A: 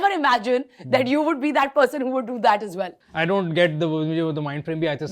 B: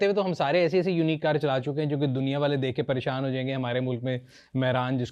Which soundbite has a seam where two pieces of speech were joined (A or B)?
A